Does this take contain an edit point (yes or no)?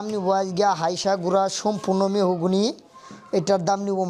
no